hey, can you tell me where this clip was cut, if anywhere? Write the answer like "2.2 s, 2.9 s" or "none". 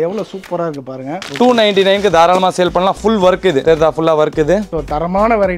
1.1 s, 4.7 s